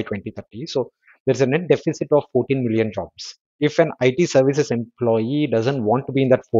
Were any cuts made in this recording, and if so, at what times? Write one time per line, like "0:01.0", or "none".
0:03.4